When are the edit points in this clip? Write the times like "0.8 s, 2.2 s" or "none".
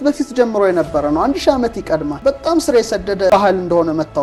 2.2 s, 3.3 s